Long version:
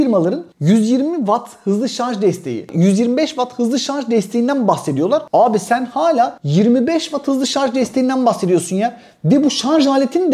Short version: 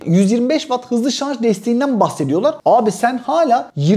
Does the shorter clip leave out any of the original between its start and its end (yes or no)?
no